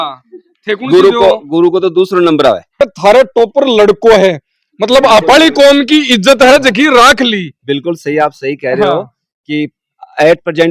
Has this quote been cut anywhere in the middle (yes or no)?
yes